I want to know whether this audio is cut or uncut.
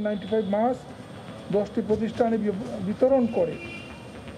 uncut